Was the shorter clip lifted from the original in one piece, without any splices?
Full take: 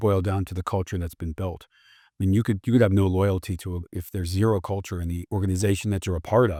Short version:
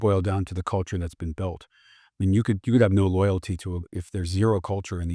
yes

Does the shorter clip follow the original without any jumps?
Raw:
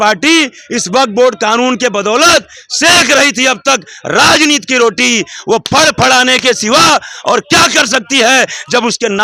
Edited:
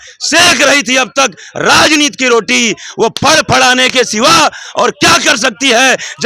yes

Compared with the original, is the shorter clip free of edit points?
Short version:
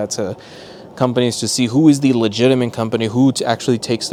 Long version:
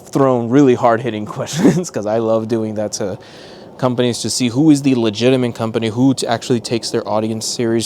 yes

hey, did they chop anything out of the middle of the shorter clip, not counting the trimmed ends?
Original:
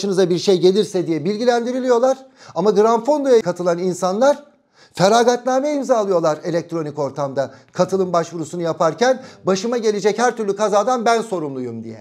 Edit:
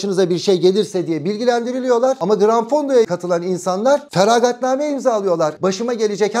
yes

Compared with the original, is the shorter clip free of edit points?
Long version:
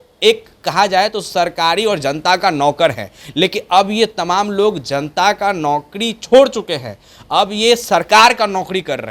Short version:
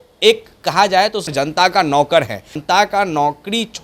no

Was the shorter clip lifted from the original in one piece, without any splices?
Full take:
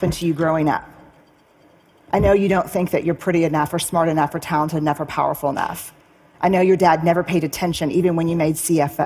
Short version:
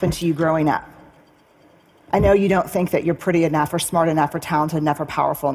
yes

